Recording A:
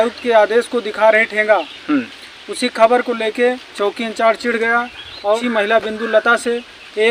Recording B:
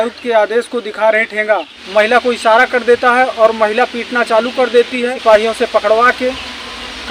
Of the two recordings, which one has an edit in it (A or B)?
B